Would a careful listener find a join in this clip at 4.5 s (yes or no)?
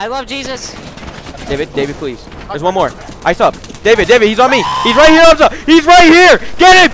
no